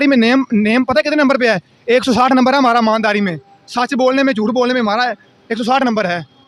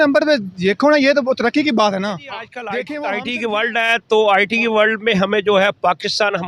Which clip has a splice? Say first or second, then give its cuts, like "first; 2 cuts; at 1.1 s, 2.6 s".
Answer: second; 1 cut; at 2.8 s